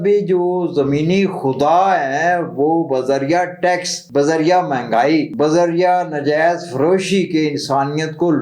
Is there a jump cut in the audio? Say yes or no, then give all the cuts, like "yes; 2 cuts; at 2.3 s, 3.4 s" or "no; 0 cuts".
yes; 2 cuts; at 3.9 s, 5.3 s